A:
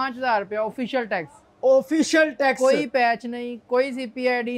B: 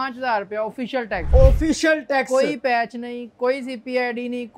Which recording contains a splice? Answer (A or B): B